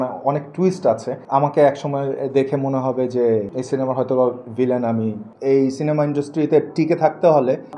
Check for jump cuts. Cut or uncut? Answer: cut